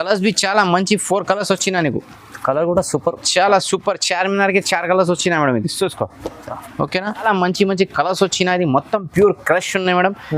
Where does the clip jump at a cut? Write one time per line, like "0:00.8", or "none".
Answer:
0:07.2